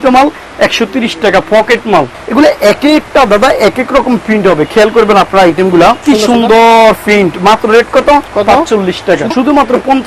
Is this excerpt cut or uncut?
cut